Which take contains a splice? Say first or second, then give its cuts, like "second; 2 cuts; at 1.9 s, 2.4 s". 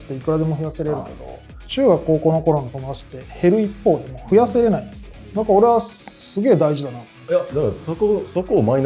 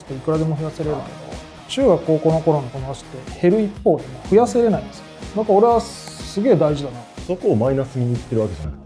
second; 1 cut; at 7.2 s